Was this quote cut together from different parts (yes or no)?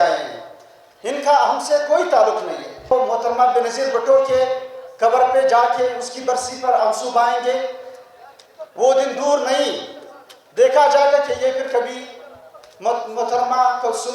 yes